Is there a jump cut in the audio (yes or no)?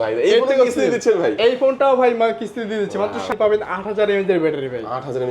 yes